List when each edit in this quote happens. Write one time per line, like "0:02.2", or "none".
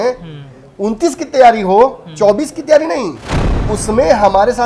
0:03.7